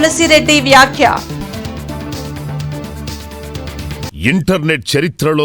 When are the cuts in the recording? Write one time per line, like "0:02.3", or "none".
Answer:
0:04.1

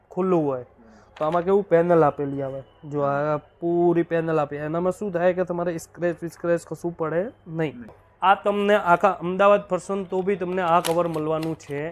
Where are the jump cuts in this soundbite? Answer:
0:08.0

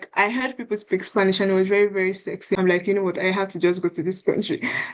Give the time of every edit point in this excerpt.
0:02.6

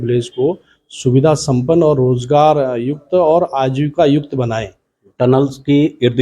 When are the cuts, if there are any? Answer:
0:05.0

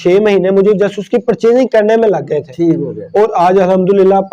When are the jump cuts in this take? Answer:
none

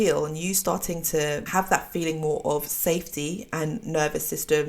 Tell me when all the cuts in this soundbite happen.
0:01.4

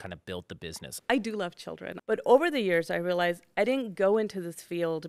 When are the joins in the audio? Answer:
0:01.0
0:01.9

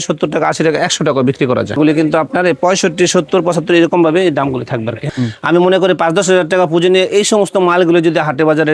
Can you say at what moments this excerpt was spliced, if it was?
0:01.8
0:05.0

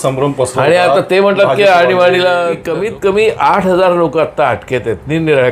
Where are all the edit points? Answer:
0:02.7

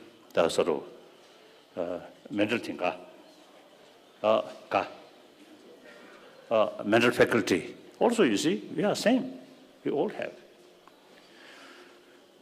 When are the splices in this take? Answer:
0:06.6

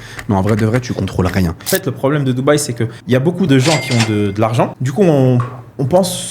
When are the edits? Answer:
0:01.6
0:03.4
0:04.8

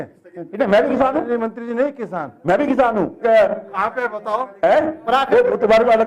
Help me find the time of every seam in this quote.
0:03.2

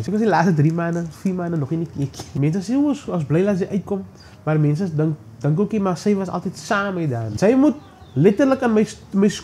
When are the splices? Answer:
0:02.3
0:07.2

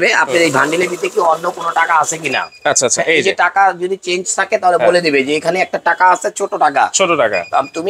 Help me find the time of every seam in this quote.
none

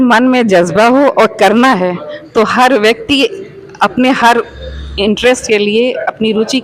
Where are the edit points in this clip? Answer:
none

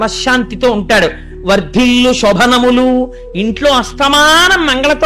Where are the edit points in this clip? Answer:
none

